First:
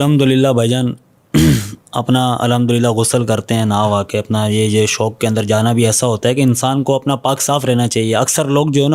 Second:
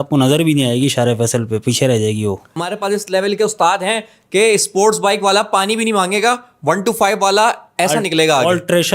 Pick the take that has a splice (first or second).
second